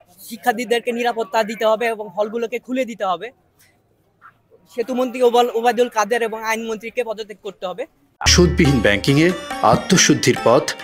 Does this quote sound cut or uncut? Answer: uncut